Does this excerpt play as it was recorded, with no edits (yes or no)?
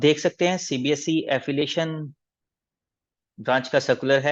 yes